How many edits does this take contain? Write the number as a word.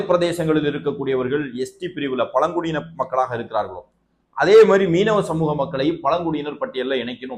zero